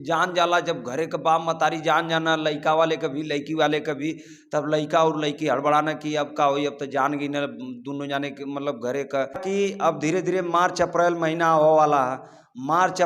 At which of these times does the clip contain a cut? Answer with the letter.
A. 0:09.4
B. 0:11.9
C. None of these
A